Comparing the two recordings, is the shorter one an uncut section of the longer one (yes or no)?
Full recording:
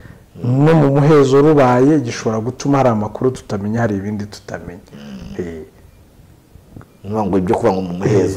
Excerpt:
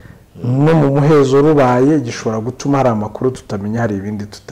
yes